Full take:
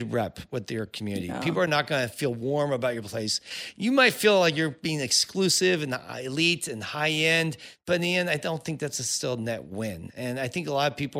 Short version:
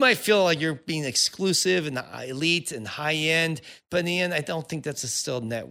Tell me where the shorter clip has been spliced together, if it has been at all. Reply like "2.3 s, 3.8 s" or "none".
none